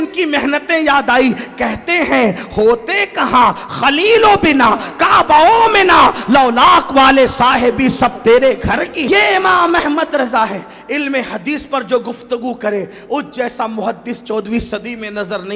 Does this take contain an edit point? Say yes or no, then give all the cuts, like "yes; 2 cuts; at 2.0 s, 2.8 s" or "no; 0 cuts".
yes; 1 cut; at 9.0 s